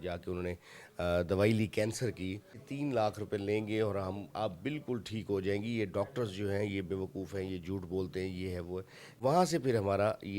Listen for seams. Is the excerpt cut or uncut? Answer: cut